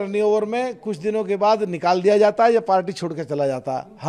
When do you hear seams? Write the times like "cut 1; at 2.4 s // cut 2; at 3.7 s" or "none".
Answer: none

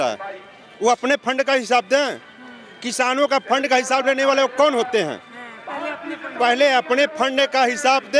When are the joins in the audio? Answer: none

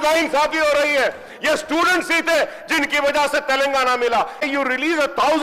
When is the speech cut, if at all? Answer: cut 1; at 4.4 s

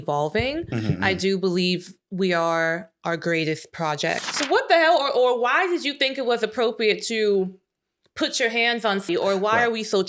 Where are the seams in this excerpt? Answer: cut 1; at 4.3 s // cut 2; at 9.1 s

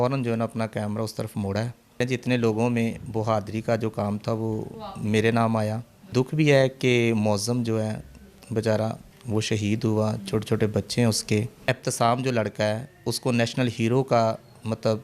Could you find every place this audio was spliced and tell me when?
cut 1; at 2.0 s // cut 2; at 6.1 s // cut 3; at 11.6 s

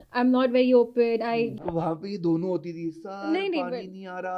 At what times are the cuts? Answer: cut 1; at 1.5 s

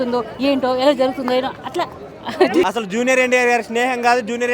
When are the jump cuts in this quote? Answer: cut 1; at 2.7 s

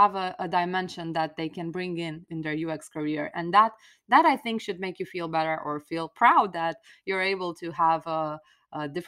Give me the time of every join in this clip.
cut 1; at 2.3 s

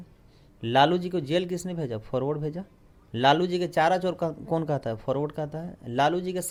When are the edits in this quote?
none

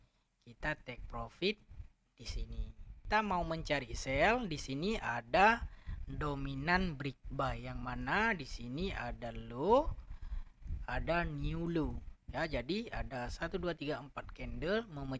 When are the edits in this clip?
cut 1; at 2.9 s

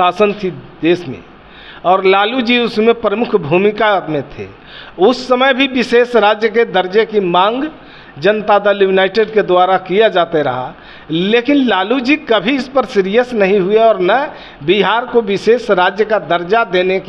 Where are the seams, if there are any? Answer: none

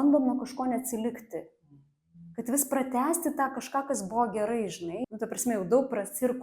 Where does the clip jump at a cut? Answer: cut 1; at 5.0 s

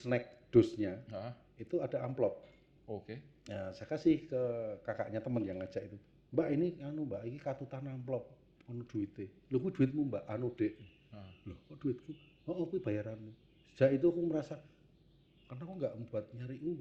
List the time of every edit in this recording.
none

